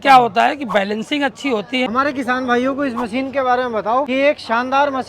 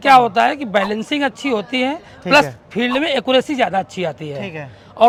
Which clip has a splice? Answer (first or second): first